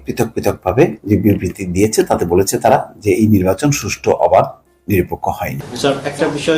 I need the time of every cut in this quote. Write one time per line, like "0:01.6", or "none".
0:05.6